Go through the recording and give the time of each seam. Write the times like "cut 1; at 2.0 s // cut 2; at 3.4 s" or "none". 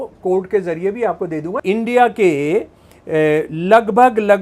cut 1; at 1.5 s